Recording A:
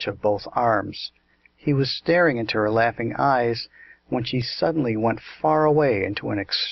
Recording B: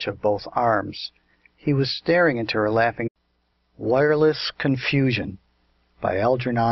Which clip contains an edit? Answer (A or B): A